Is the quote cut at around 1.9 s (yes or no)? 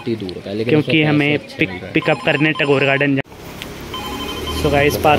no